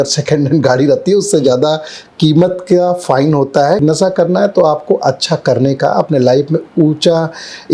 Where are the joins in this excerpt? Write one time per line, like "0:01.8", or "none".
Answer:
0:03.8